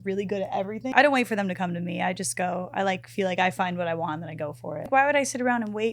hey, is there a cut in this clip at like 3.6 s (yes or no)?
no